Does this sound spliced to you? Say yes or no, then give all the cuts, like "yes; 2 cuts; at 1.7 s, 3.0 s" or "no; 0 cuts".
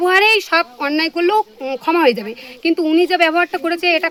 no; 0 cuts